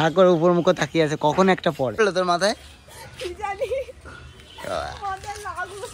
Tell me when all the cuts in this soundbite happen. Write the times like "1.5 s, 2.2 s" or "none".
1.9 s